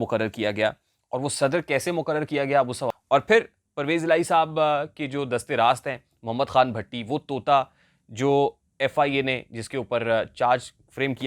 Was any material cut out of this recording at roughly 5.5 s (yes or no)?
no